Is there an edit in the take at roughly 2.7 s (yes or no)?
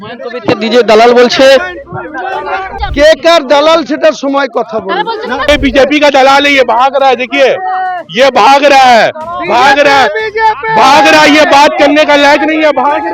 yes